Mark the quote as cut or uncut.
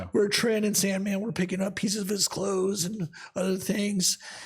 uncut